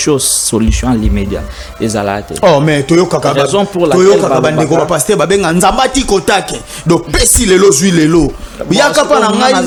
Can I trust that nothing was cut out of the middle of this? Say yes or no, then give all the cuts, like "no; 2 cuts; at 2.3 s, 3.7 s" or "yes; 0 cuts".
yes; 0 cuts